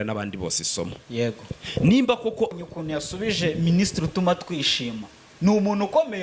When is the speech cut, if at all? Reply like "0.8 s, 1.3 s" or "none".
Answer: 2.6 s